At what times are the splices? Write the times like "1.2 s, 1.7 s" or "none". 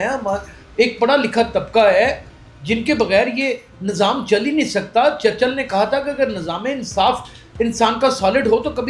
none